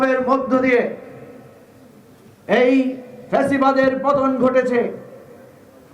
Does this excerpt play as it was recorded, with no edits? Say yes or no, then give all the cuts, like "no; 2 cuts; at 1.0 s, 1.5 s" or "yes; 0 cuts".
yes; 0 cuts